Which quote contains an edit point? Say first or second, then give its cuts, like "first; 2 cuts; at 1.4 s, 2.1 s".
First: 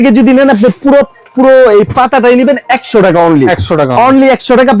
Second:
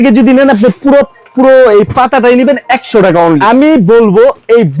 second; 1 cut; at 3.4 s